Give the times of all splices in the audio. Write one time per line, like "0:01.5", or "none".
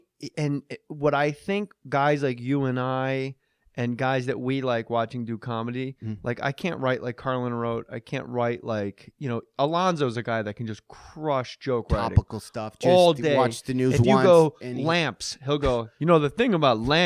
none